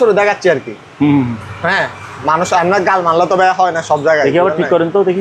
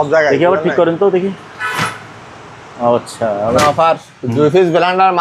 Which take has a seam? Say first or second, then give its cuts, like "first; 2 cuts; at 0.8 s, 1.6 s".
second; 1 cut; at 3.6 s